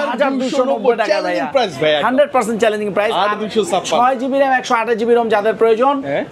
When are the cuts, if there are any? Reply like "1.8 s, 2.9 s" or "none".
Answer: none